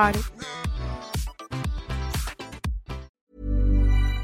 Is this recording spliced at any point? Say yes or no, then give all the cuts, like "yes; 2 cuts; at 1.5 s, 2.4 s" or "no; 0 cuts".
yes; 1 cut; at 3.1 s